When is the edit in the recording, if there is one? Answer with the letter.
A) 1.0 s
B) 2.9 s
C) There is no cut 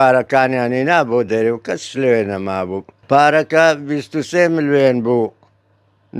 B